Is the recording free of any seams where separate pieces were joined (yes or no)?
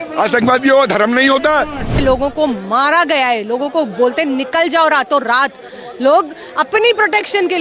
no